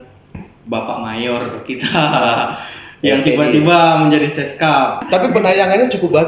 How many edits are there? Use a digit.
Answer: 1